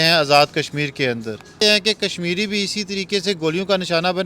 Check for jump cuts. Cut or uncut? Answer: cut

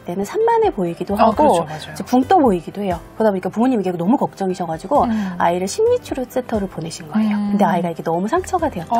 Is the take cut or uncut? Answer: uncut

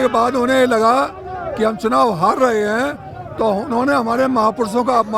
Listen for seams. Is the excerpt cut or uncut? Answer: uncut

